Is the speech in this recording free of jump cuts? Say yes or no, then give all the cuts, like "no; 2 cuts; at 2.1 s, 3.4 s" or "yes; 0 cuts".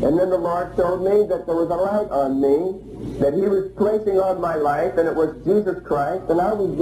yes; 0 cuts